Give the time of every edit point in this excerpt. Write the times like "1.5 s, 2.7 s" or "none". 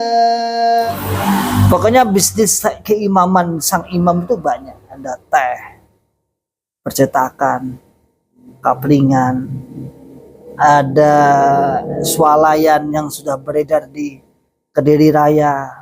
0.9 s